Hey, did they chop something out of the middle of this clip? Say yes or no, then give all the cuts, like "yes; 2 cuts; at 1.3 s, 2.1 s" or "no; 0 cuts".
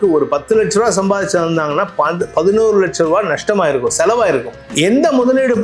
yes; 1 cut; at 4.6 s